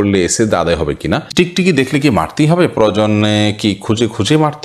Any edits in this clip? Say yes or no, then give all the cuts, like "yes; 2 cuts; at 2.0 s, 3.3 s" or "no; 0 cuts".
yes; 1 cut; at 1.3 s